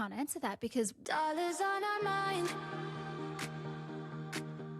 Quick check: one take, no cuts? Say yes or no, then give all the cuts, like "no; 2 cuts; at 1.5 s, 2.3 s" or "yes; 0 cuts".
no; 1 cut; at 1.0 s